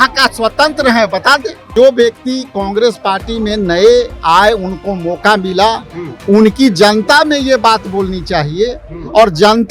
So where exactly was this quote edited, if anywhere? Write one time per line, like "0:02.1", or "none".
0:01.7